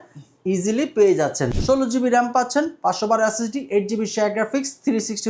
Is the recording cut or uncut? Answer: cut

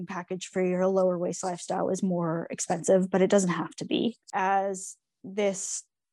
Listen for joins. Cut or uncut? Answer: cut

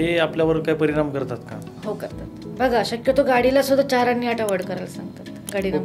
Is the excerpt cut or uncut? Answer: cut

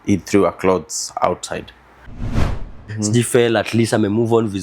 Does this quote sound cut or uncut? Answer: cut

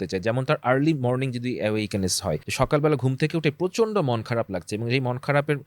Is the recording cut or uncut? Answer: cut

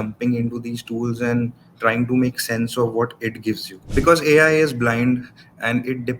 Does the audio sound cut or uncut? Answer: cut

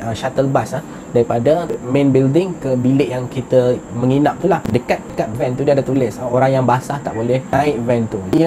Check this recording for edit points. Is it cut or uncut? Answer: uncut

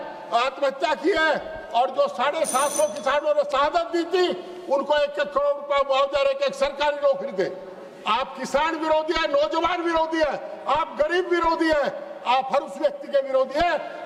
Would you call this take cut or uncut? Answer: uncut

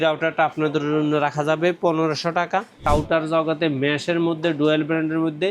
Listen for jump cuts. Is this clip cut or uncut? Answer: cut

